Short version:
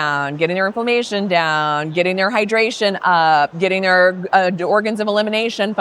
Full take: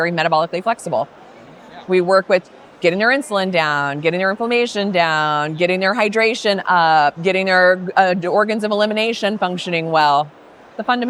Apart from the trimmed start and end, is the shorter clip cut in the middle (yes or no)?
no